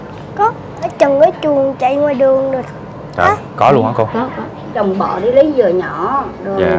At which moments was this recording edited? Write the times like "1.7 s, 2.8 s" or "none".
0.9 s, 4.7 s